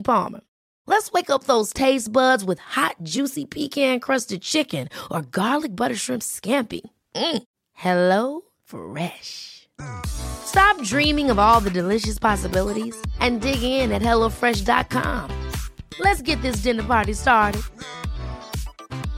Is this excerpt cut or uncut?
uncut